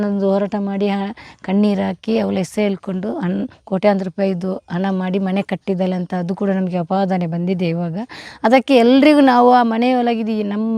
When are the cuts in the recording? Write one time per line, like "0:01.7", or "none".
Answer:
none